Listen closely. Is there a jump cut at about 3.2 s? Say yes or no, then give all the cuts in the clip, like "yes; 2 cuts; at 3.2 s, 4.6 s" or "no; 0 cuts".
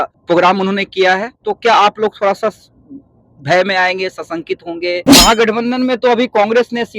no; 2 cuts; at 1.4 s, 5.1 s